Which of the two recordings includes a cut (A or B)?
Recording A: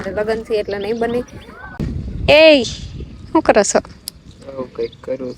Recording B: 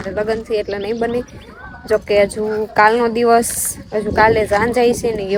A